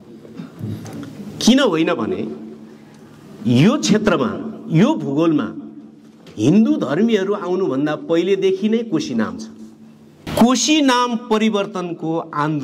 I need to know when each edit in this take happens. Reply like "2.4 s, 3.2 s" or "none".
10.3 s